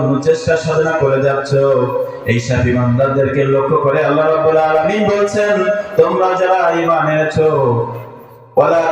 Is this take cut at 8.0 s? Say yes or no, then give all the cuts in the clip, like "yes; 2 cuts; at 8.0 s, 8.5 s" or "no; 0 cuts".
yes; 1 cut; at 8.0 s